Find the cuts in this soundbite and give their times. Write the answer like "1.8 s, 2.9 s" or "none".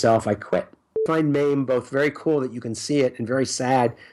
0.9 s